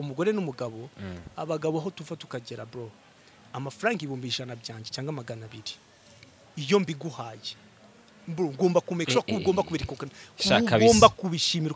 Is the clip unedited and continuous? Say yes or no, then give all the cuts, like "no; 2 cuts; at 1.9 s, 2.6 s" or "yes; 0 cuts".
yes; 0 cuts